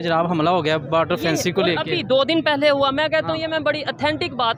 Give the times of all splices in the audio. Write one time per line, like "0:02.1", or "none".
none